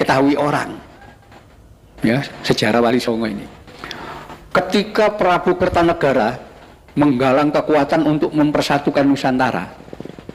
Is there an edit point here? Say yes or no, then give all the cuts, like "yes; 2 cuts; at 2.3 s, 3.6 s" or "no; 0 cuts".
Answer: no; 0 cuts